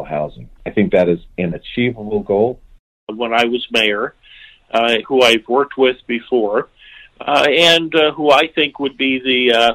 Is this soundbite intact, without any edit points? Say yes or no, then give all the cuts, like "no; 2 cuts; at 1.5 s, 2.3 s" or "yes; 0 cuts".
no; 1 cut; at 3.0 s